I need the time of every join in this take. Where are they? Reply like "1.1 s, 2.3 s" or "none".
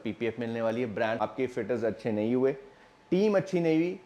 1.2 s